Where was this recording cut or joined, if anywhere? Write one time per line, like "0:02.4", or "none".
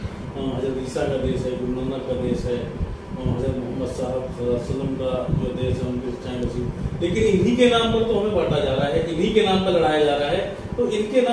none